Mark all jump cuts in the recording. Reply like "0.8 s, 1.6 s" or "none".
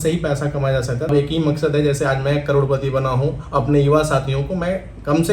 1.1 s